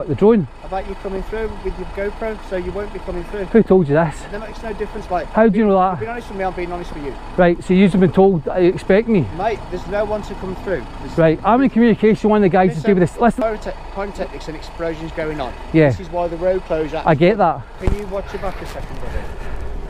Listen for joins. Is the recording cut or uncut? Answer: uncut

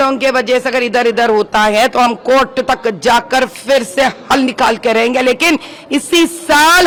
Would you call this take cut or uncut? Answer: uncut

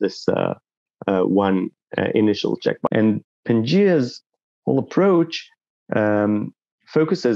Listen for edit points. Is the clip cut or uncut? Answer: cut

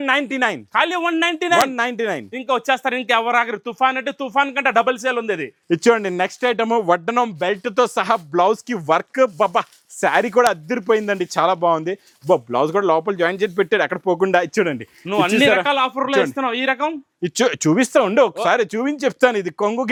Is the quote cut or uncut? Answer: uncut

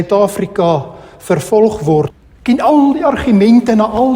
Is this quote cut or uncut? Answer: cut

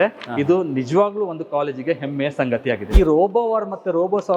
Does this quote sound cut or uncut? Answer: cut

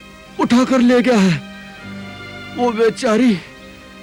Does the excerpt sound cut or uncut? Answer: uncut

